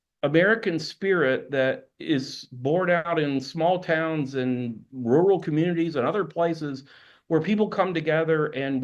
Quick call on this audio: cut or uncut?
cut